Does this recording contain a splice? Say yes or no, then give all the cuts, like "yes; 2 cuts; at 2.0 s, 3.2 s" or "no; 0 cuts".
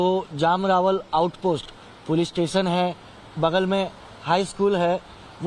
no; 0 cuts